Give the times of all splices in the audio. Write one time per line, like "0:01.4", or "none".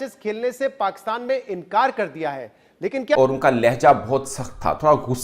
0:03.2